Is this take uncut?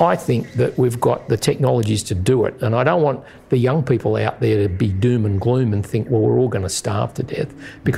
yes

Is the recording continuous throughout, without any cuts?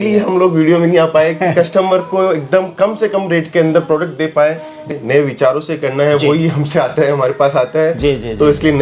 no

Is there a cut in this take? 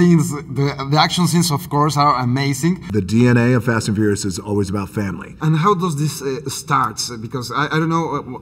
yes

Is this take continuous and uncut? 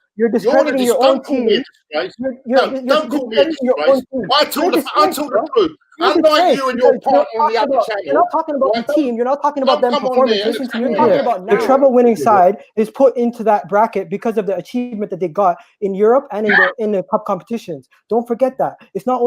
no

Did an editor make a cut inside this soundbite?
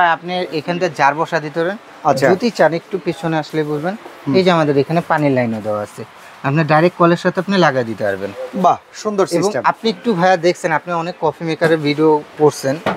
no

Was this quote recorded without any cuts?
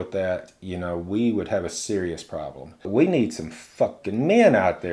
no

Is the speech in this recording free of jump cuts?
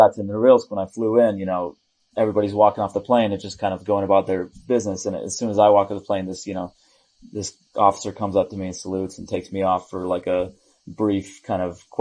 yes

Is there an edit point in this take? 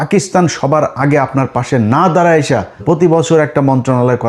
yes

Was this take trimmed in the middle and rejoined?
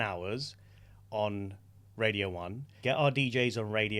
yes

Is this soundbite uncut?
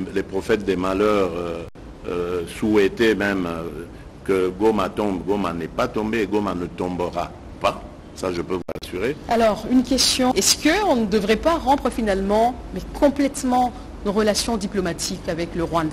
no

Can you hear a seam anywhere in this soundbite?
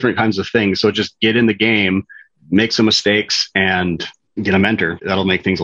yes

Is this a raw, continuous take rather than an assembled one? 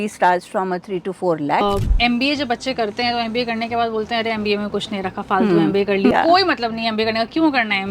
no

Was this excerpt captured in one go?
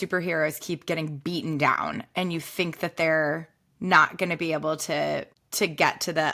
no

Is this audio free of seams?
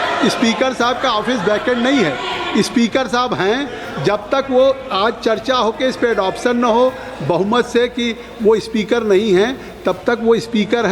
yes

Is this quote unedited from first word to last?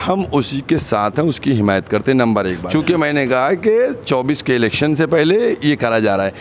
no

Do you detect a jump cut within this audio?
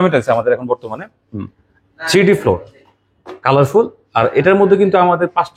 no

